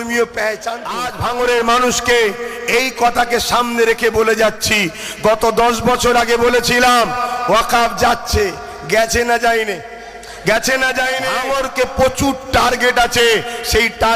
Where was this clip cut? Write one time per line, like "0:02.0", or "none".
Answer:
0:01.1
0:11.2